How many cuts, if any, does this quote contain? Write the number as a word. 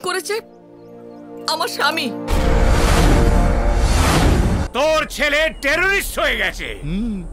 one